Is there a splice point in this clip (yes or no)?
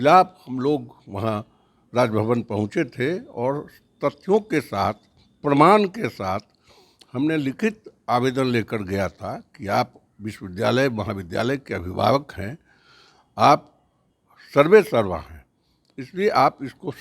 no